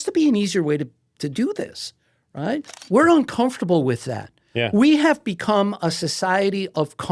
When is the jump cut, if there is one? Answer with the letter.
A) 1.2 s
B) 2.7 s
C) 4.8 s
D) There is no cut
B